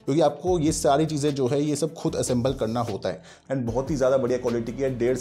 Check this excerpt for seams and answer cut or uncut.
cut